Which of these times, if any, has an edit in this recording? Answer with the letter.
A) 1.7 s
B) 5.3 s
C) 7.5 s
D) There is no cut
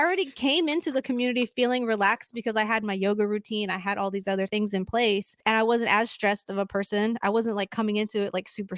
B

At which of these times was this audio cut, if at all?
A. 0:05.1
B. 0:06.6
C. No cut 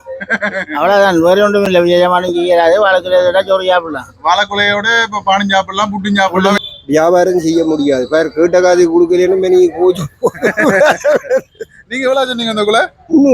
B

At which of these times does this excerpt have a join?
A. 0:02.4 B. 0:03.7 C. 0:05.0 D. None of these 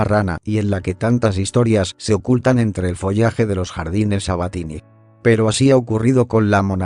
B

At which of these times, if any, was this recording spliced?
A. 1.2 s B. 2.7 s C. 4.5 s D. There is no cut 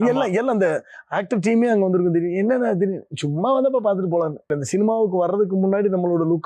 C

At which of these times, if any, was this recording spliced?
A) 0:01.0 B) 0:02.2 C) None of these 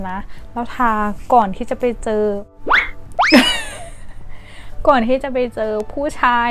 C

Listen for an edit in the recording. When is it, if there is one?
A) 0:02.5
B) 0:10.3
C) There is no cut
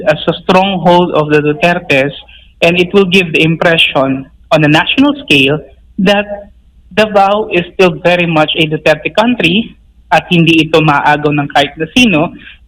C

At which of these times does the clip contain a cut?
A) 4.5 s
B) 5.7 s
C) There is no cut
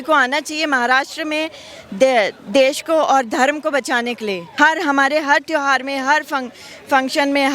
A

